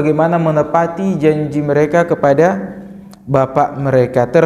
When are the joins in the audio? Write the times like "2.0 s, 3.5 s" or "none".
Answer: none